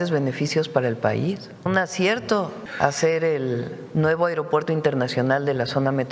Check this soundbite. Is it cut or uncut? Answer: cut